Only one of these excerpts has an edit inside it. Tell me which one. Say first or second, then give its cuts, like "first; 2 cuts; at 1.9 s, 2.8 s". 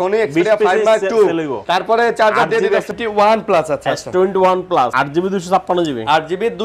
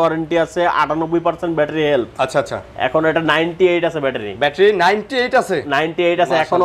first; 3 cuts; at 1.6 s, 2.9 s, 4.9 s